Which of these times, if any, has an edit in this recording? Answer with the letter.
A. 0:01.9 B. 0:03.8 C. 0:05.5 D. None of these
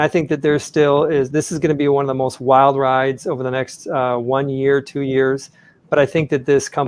C